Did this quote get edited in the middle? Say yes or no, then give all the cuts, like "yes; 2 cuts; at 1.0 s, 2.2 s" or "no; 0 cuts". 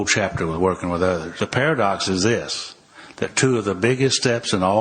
yes; 1 cut; at 1.3 s